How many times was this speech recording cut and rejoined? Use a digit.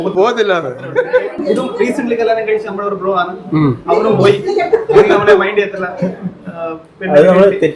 1